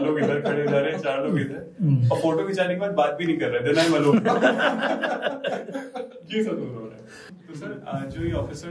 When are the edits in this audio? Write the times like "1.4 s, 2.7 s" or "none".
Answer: 7.7 s